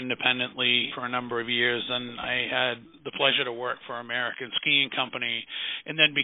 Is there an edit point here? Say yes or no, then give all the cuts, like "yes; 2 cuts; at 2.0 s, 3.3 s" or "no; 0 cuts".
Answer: yes; 2 cuts; at 0.9 s, 2.9 s